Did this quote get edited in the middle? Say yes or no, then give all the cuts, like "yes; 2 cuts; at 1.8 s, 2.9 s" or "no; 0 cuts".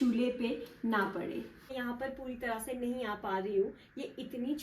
yes; 1 cut; at 1.5 s